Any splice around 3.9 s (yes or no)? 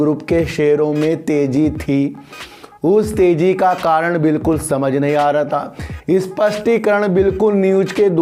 no